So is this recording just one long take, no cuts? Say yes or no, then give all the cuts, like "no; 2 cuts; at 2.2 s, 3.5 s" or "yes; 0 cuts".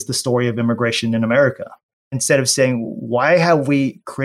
no; 1 cut; at 2.2 s